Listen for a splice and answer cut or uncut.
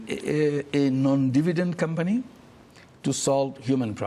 uncut